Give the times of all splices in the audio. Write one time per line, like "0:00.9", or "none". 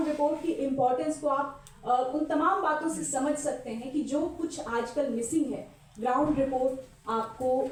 none